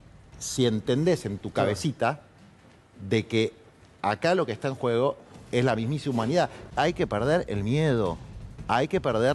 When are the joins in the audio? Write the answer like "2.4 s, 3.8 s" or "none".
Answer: 6.6 s